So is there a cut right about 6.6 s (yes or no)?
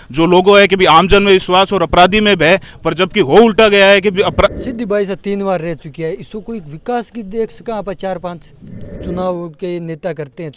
no